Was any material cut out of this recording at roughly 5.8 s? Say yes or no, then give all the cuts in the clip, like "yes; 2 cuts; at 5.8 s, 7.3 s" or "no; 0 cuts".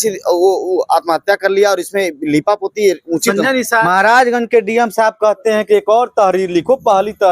no; 1 cut; at 3.9 s